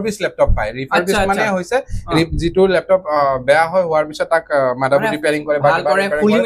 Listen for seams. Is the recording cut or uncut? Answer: uncut